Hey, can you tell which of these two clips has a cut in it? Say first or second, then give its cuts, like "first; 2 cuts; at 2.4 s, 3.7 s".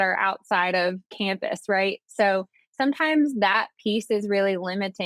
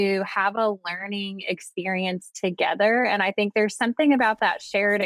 first; 1 cut; at 1.0 s